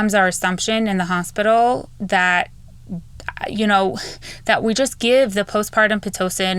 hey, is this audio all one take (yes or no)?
yes